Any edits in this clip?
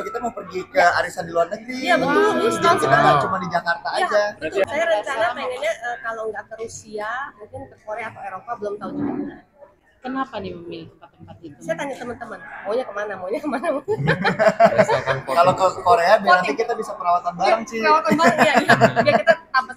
yes; 1 cut; at 4.7 s

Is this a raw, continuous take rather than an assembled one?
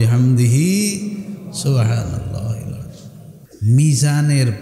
no; 1 cut; at 3.4 s

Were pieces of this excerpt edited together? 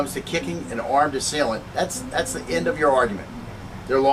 yes; 1 cut; at 2.9 s

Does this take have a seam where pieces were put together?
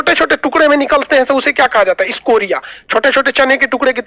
no; 0 cuts

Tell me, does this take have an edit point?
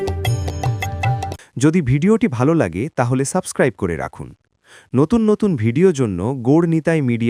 no; 0 cuts

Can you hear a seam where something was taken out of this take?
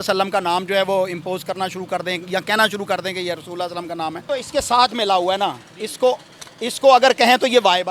yes; 1 cut; at 4.2 s

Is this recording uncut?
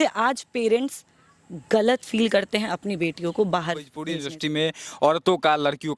no; 1 cut; at 4.0 s

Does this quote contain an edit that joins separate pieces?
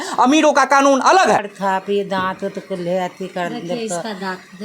yes; 1 cut; at 1.5 s

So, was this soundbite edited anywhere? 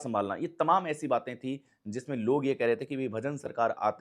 no; 0 cuts

